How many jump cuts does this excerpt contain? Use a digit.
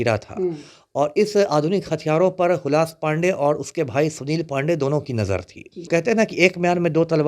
1